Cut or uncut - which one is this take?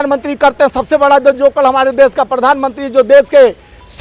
uncut